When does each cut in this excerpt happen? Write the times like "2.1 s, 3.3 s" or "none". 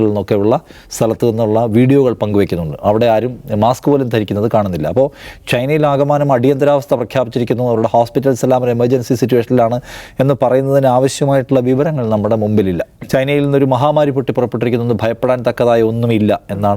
12.9 s